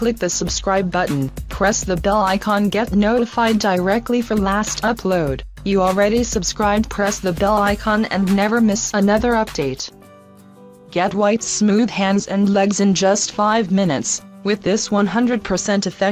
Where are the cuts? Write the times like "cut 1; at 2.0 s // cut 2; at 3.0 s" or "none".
none

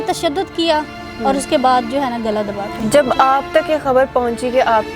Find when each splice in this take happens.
none

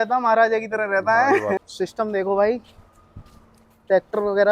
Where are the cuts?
cut 1; at 1.6 s

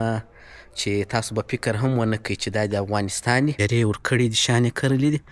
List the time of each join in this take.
cut 1; at 3.6 s

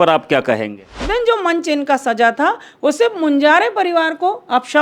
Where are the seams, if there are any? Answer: cut 1; at 1.0 s

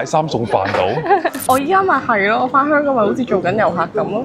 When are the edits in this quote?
cut 1; at 1.4 s

